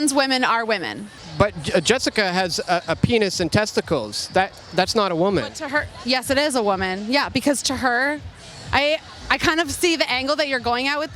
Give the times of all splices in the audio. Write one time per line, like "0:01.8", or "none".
0:01.2